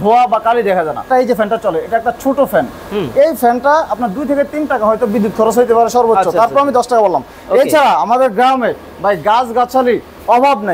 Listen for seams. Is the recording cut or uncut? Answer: cut